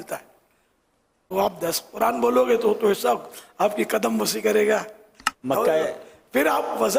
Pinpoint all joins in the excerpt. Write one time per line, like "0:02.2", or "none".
none

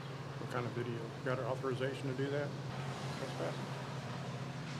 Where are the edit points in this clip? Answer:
0:02.7

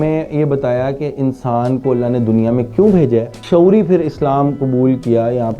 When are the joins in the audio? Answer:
0:03.4

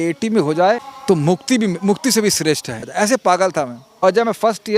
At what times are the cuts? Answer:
0:00.9
0:02.9
0:03.8

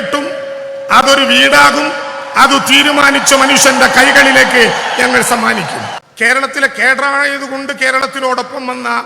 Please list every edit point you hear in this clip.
0:06.0

